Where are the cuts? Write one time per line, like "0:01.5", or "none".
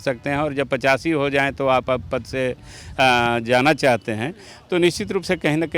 none